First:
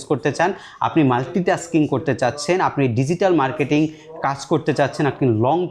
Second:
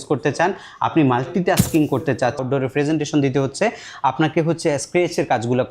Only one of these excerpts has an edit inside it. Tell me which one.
second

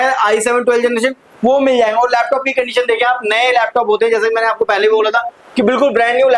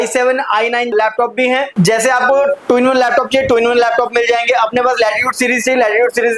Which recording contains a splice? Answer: second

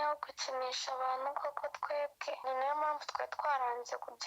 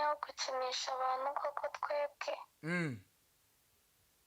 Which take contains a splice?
first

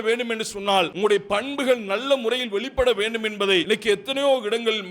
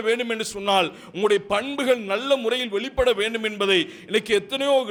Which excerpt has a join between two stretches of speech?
first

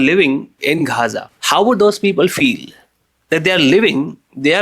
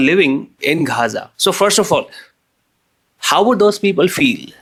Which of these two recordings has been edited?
first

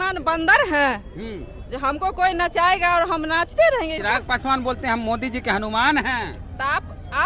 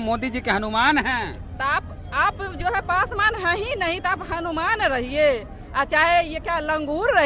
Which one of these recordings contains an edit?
first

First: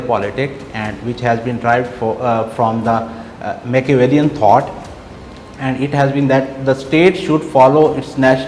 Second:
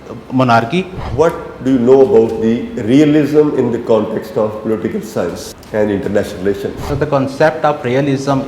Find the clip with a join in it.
second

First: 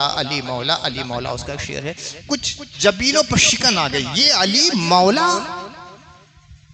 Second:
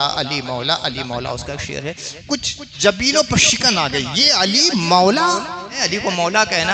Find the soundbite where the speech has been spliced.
second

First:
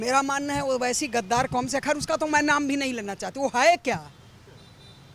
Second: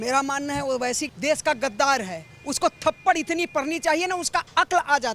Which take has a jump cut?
second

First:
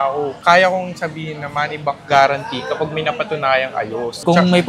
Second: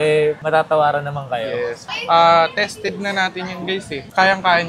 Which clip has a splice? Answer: second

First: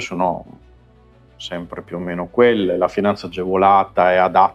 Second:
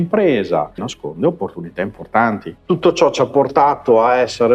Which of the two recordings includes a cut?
second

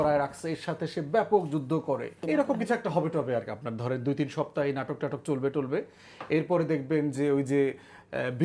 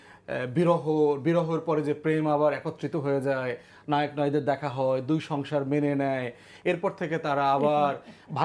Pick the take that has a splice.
first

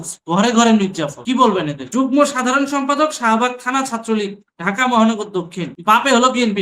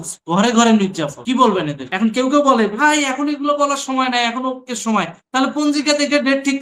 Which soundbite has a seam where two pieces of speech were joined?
first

